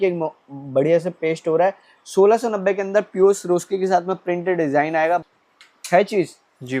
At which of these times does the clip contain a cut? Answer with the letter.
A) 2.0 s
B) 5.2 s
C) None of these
B